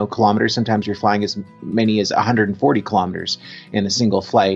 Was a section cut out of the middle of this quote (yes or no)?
no